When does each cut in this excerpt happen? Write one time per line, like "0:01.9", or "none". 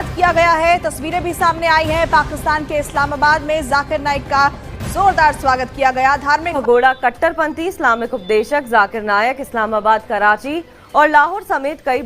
0:06.5

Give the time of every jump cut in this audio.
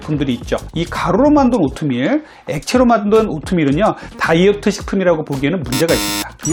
none

